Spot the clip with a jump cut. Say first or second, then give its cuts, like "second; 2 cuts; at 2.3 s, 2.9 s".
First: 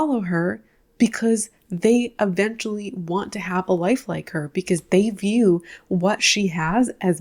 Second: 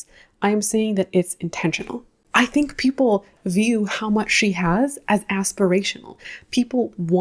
second; 1 cut; at 2.2 s